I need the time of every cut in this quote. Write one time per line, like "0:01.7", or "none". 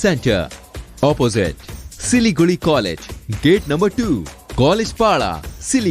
none